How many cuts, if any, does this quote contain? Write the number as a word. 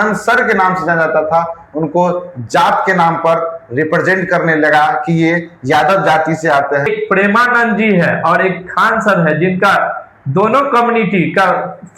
one